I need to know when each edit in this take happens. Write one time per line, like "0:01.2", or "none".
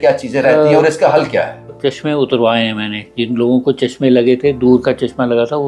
0:01.7